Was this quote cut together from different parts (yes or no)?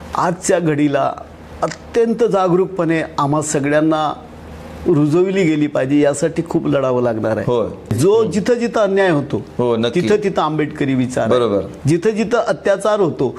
yes